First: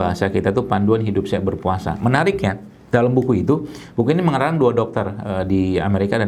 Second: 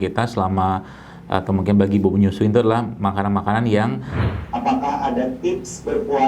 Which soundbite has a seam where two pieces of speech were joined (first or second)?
second